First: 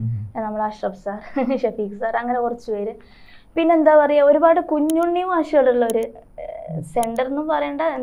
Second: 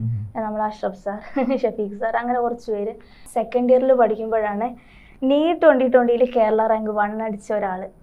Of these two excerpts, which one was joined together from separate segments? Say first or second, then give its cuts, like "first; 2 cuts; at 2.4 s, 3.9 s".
second; 1 cut; at 3.1 s